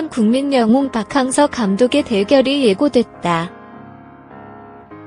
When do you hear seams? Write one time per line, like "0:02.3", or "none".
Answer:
0:03.6